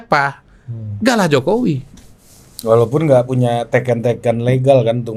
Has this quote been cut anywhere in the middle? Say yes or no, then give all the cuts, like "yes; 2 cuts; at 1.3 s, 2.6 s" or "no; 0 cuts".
no; 0 cuts